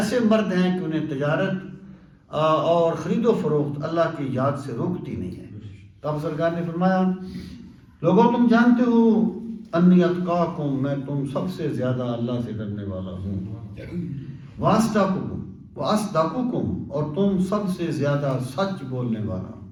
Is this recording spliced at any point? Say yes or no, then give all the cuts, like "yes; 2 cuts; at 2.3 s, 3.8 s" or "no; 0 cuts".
no; 0 cuts